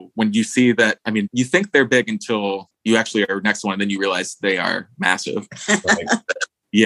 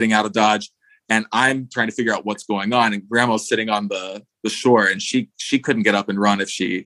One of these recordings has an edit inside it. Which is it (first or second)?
first